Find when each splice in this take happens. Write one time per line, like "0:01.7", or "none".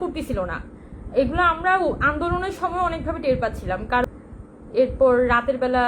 0:04.0